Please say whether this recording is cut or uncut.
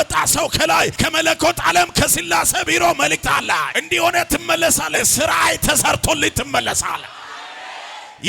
cut